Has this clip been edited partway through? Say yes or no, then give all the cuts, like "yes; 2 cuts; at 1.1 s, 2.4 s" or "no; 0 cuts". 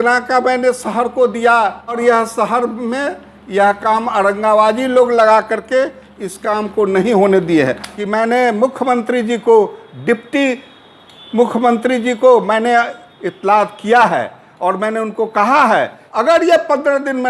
yes; 3 cuts; at 2.0 s, 7.9 s, 16.0 s